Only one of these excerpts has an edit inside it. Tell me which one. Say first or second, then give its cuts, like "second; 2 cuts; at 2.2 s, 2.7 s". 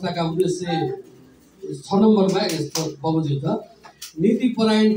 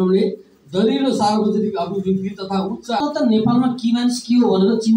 second; 1 cut; at 3.0 s